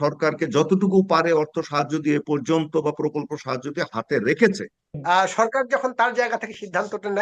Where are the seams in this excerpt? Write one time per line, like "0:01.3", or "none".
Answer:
0:04.9